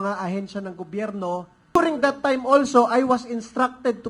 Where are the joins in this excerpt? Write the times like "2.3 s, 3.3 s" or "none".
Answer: 1.8 s

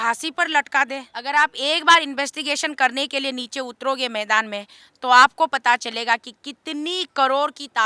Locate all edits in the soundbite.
1.1 s

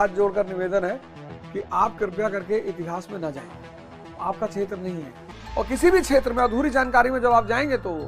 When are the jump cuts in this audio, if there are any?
5.4 s

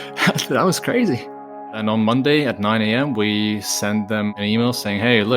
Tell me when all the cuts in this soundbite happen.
1.7 s, 4.3 s

